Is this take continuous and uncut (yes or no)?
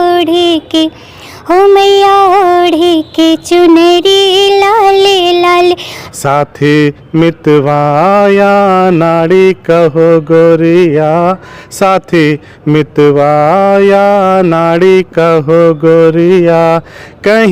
no